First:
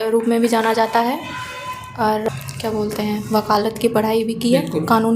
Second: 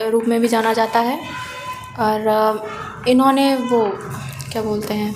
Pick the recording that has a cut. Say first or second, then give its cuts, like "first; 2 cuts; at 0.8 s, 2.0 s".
first; 1 cut; at 2.2 s